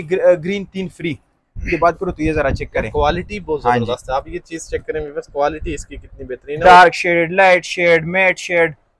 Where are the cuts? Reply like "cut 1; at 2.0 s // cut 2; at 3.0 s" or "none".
cut 1; at 1.6 s // cut 2; at 6.6 s